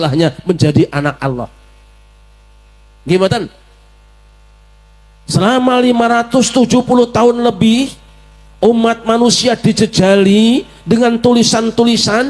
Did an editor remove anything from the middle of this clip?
no; 0 cuts

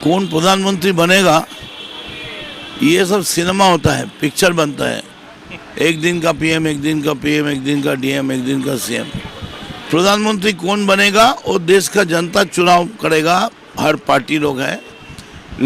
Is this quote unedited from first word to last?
yes; 0 cuts

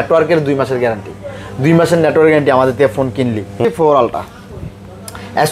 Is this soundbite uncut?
no; 1 cut; at 3.7 s

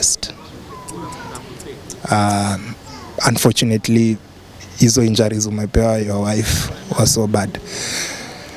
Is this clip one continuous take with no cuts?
yes; 0 cuts

